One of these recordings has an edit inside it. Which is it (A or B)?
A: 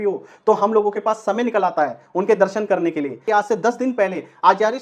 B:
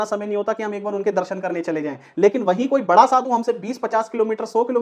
A